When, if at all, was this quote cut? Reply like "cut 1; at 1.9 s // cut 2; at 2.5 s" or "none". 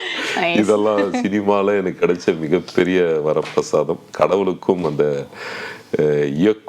none